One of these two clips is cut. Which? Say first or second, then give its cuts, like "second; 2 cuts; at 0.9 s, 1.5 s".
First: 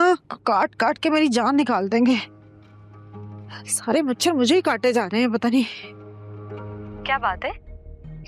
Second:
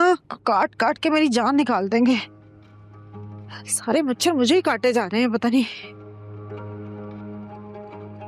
first; 1 cut; at 6.9 s